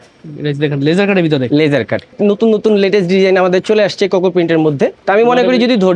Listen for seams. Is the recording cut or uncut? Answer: cut